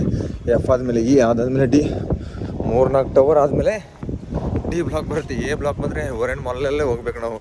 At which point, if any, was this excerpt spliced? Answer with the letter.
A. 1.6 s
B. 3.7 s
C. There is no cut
C